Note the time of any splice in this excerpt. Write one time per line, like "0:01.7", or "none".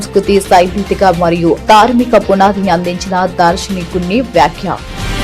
none